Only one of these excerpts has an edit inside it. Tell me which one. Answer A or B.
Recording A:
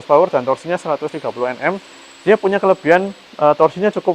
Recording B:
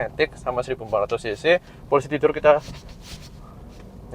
B